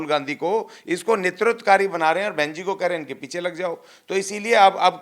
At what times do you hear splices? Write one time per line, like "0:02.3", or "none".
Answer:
none

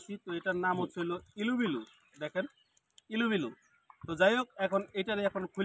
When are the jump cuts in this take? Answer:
none

